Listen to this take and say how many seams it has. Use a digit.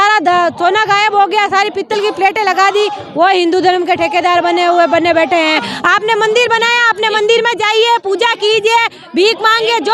1